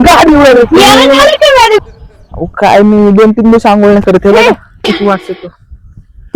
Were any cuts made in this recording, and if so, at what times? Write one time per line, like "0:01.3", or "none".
0:01.8